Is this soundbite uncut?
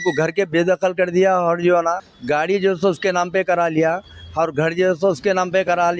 no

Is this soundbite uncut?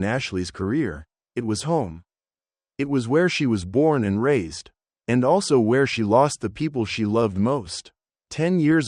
no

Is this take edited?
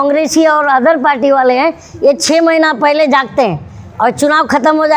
no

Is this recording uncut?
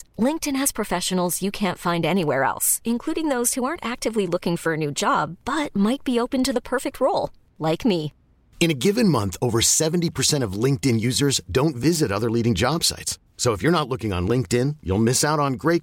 yes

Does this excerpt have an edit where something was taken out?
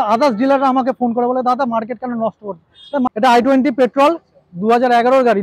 yes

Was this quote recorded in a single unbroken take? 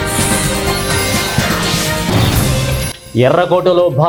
yes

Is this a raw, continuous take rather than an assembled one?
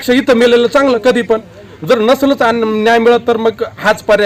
yes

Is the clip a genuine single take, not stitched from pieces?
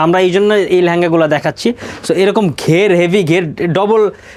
yes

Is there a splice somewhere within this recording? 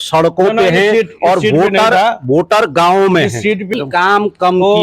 yes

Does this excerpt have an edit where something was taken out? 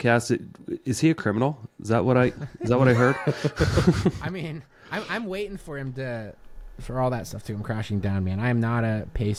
no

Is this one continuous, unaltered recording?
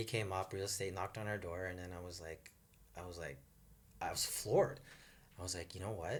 yes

